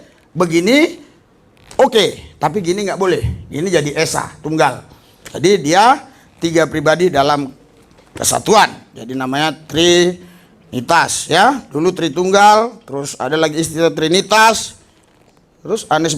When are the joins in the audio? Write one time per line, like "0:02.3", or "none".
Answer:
none

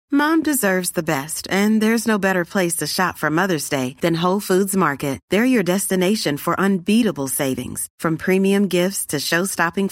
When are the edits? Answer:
none

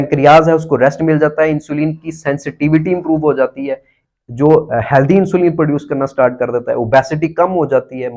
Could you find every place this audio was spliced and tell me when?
none

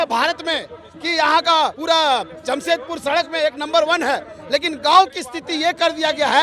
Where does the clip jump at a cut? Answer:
0:01.8

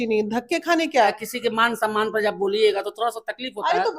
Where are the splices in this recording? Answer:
0:01.2

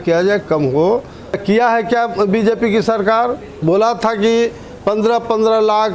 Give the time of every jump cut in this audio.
0:01.4
0:03.6

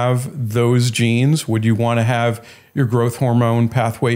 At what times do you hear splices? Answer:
none

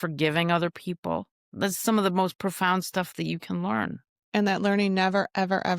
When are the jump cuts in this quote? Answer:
0:01.4
0:04.1

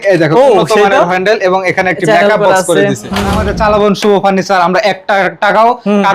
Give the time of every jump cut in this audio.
0:03.4

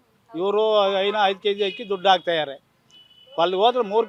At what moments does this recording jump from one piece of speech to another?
none

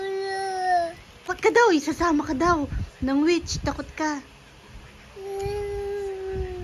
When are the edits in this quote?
0:01.3

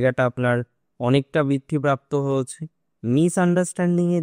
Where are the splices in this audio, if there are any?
none

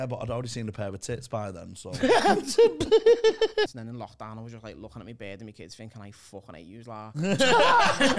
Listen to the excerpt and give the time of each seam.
0:03.7

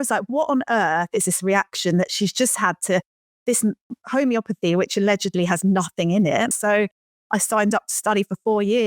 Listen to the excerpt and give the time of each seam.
0:06.5

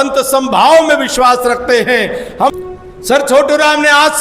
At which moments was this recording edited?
0:02.5

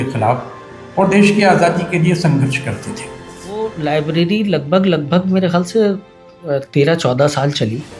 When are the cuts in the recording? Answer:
0:03.6

